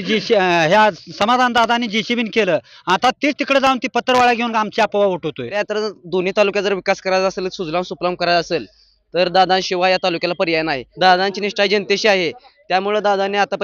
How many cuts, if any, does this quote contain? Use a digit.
2